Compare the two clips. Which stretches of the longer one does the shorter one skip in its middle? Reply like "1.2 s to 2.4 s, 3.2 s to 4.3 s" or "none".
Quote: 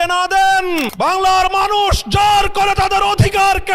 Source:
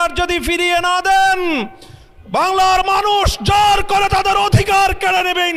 1.6 s to 2.2 s